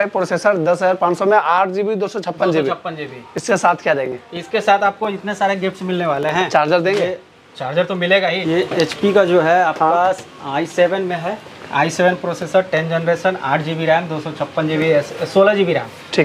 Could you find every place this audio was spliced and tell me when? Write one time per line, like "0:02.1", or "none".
0:08.4